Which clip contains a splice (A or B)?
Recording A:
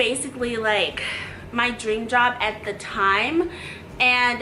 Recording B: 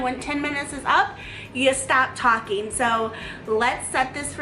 B